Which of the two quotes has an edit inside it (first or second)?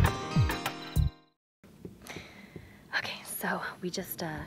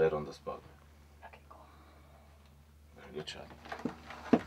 first